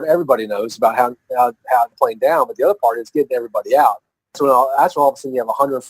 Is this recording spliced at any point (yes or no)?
yes